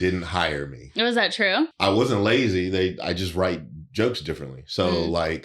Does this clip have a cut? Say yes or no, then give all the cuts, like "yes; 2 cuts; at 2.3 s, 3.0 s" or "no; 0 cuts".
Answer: yes; 1 cut; at 1.7 s